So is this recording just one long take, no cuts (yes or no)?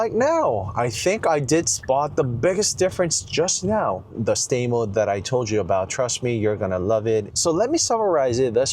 no